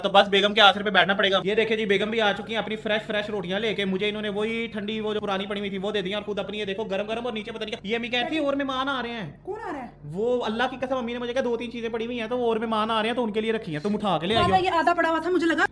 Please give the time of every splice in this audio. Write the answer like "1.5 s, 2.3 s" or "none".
none